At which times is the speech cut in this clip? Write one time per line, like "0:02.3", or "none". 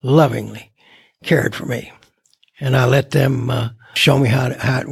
0:03.9